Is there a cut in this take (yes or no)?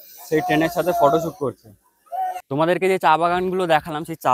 yes